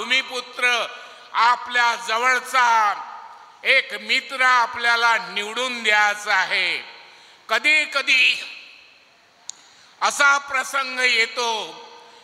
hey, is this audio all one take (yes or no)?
yes